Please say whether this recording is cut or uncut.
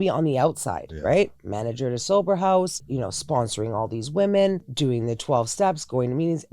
cut